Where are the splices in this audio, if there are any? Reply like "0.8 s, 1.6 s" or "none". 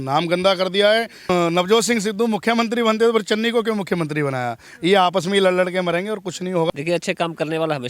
1.3 s, 6.7 s